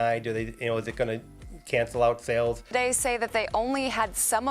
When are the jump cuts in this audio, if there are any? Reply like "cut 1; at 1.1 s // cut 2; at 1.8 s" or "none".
cut 1; at 2.6 s